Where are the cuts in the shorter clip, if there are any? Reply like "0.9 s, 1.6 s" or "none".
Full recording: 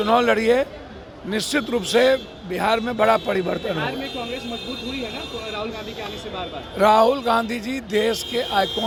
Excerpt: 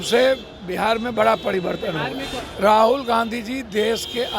2.4 s